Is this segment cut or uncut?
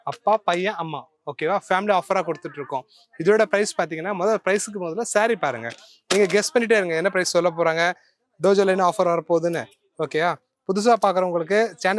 uncut